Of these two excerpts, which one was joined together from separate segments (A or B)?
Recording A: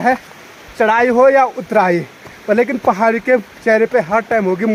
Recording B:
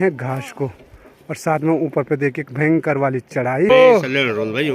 B